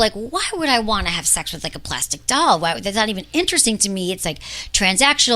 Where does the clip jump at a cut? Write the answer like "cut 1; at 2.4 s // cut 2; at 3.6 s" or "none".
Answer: none